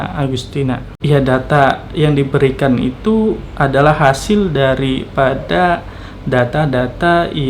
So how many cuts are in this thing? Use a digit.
1